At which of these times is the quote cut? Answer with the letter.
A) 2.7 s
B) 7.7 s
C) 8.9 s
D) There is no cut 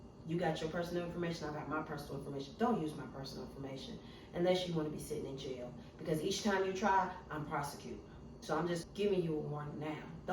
C